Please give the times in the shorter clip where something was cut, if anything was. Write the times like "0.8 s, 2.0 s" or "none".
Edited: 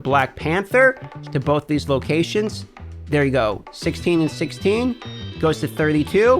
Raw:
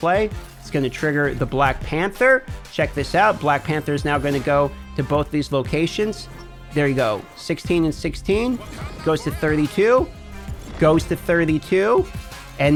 1.2 s